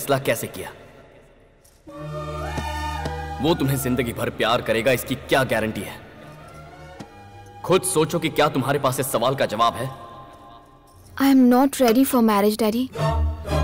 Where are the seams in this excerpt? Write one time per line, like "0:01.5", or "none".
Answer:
none